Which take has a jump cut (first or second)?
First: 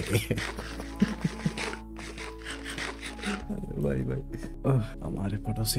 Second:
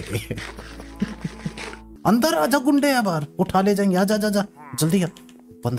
second